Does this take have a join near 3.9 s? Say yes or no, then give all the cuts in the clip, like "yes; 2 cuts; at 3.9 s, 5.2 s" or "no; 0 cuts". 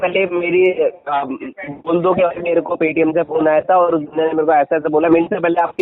no; 0 cuts